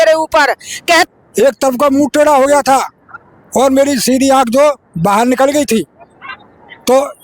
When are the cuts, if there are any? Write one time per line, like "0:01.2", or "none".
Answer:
0:01.1